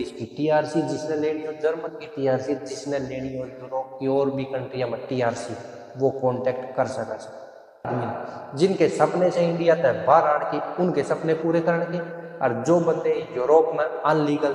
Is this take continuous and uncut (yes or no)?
no